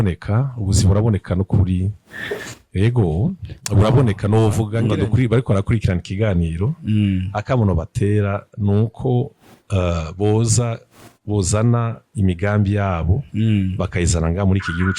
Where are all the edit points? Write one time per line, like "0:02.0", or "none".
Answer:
0:04.8